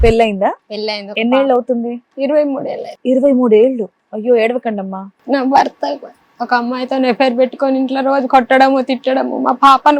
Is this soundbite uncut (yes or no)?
no